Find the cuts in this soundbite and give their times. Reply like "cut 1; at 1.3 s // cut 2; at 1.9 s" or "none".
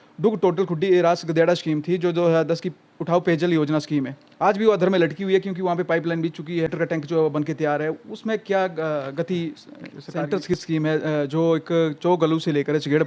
cut 1; at 6.7 s // cut 2; at 10.5 s